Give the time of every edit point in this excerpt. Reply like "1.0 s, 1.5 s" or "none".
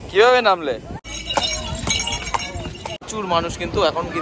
1.0 s, 3.0 s